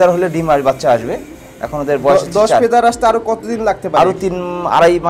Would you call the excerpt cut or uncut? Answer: uncut